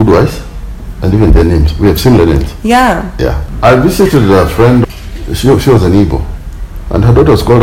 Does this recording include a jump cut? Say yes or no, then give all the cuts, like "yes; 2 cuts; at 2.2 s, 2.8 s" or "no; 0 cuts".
yes; 2 cuts; at 3.4 s, 4.8 s